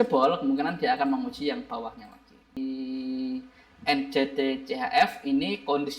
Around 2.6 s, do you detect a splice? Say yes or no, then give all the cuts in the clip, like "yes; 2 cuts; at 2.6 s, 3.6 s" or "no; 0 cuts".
yes; 1 cut; at 2.6 s